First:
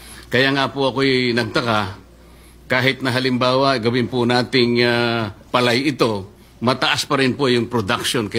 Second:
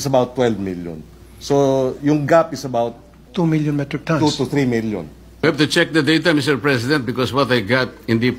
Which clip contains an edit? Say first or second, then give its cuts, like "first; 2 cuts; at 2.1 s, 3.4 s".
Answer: second; 1 cut; at 5.4 s